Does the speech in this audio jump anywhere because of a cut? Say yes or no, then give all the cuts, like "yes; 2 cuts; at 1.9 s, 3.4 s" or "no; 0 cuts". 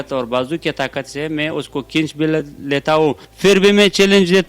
yes; 1 cut; at 3.3 s